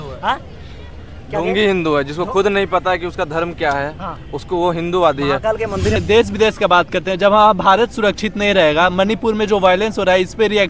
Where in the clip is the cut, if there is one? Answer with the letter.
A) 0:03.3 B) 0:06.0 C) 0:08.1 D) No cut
B